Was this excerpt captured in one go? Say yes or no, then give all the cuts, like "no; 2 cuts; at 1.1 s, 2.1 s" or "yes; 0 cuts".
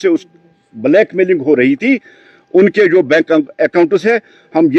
yes; 0 cuts